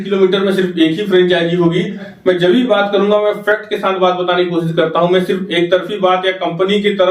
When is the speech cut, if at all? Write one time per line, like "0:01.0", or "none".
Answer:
0:02.0